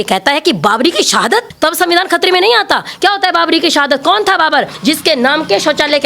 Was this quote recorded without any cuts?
no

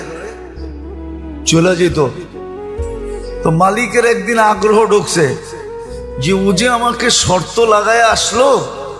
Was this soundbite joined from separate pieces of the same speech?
yes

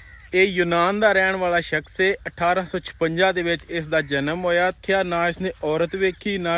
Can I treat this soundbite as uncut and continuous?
no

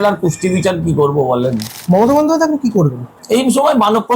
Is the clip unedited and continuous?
no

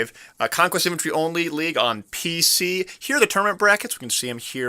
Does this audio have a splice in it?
yes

